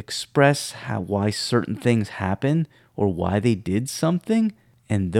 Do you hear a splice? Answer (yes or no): no